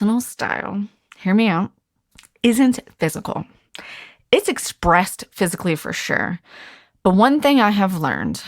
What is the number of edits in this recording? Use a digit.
0